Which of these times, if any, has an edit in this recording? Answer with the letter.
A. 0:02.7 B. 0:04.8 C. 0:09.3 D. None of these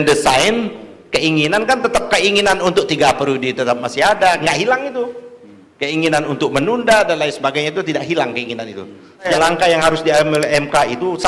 C